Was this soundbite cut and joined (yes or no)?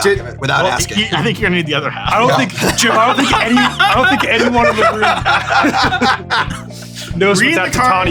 no